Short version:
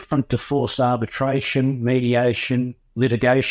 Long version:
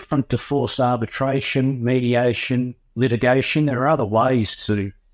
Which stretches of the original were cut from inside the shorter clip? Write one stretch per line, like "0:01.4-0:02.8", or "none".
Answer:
none